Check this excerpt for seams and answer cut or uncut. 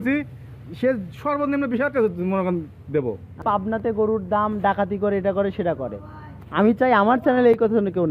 cut